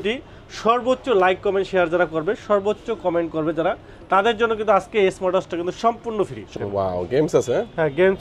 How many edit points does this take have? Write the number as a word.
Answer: one